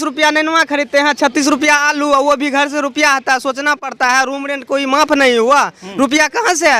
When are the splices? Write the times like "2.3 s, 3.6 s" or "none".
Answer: none